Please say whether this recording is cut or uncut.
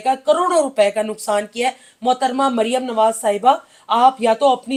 uncut